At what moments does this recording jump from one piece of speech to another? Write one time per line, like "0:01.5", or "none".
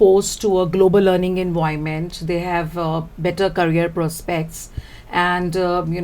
none